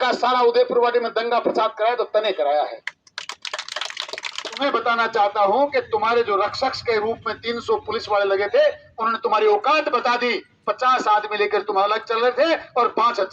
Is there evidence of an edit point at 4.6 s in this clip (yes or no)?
yes